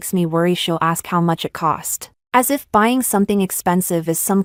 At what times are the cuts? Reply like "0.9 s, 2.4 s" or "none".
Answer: none